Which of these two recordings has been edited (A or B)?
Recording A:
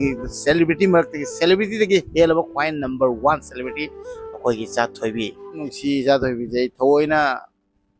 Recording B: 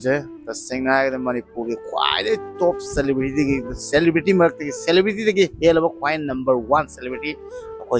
A